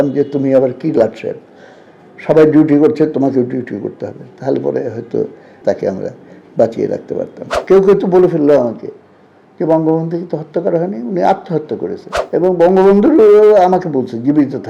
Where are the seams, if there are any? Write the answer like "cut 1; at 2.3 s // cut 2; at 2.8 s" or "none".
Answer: cut 1; at 5.5 s // cut 2; at 7.5 s // cut 3; at 12.1 s